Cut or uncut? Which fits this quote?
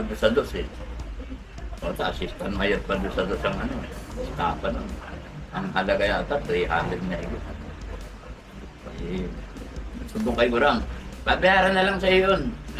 uncut